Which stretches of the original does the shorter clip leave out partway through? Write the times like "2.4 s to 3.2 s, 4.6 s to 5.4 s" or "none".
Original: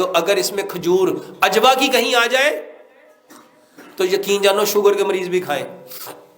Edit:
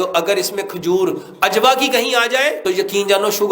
2.6 s to 3.9 s